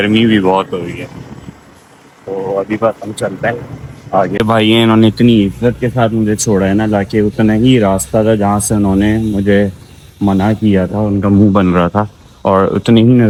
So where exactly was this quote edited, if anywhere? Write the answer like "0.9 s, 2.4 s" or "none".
none